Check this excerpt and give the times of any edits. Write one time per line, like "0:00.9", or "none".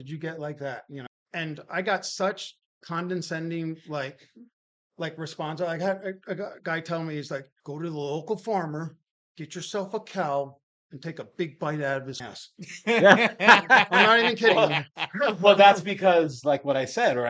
0:01.0
0:07.6
0:12.2